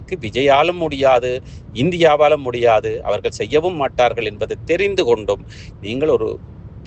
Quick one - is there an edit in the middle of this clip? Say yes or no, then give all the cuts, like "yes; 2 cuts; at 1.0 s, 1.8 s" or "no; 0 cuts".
no; 0 cuts